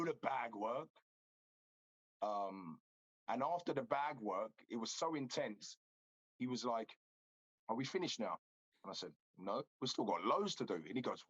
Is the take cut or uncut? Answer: uncut